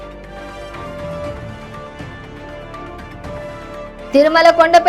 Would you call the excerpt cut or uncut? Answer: cut